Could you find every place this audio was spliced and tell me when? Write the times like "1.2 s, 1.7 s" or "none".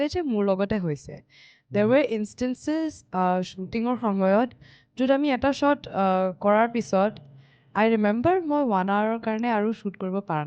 none